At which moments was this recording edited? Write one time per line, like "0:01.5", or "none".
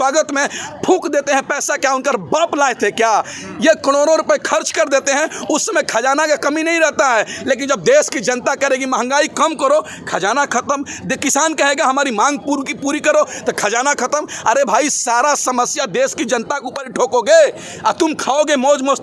none